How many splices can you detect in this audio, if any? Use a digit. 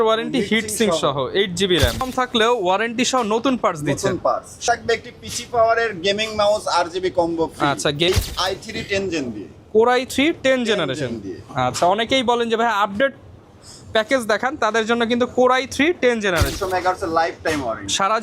4